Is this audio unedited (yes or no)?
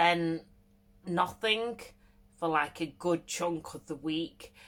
yes